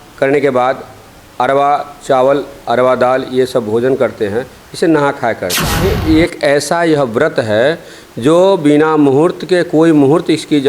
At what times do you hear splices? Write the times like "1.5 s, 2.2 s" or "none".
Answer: 5.7 s